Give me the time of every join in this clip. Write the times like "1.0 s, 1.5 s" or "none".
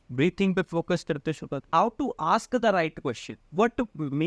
1.5 s